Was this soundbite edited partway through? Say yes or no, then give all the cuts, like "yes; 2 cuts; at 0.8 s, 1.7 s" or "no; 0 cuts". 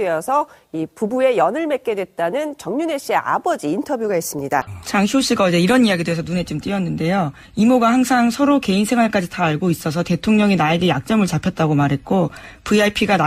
no; 0 cuts